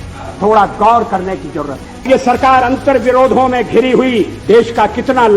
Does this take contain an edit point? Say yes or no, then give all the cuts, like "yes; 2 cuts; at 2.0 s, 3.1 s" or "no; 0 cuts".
yes; 2 cuts; at 2.1 s, 4.3 s